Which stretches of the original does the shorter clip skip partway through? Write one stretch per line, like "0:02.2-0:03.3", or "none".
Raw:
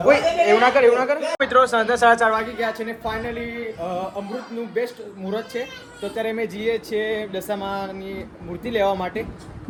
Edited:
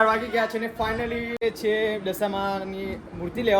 0:03.7-0:06.7